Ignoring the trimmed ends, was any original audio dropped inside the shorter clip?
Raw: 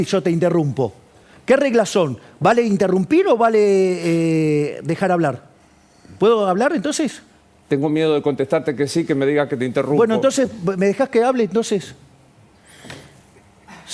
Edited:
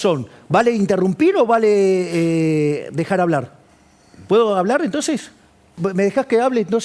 yes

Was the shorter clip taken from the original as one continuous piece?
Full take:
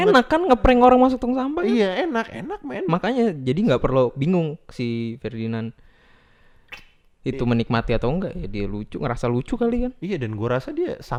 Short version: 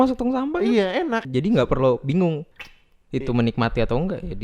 no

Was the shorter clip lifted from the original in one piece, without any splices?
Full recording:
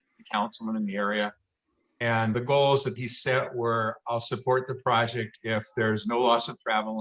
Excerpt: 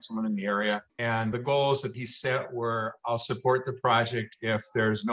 no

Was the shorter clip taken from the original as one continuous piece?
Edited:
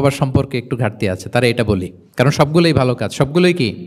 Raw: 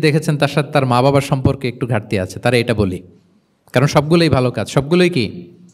no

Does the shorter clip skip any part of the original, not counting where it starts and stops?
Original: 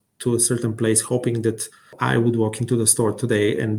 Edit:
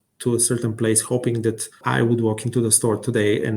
yes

